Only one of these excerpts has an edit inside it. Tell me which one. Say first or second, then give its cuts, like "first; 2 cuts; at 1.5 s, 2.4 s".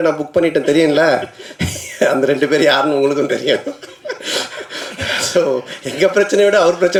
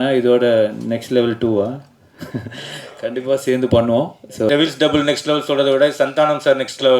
second; 1 cut; at 4.5 s